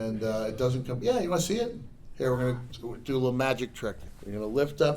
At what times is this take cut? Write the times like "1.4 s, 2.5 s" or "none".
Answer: 4.0 s